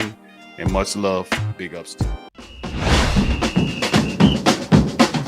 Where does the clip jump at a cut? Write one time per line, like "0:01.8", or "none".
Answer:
0:02.9